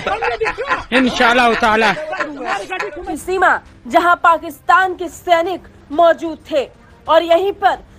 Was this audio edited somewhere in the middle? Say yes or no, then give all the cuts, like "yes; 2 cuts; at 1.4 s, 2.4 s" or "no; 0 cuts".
yes; 1 cut; at 3.1 s